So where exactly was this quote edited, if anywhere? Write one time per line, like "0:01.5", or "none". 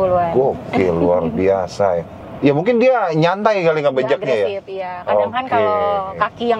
0:02.1